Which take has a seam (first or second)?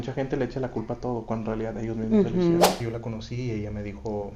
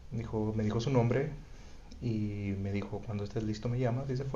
first